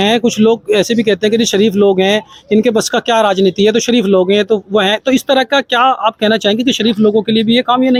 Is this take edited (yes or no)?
no